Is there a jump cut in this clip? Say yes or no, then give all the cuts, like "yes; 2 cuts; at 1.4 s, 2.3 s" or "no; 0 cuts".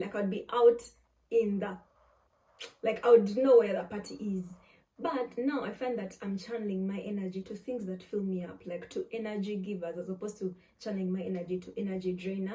no; 0 cuts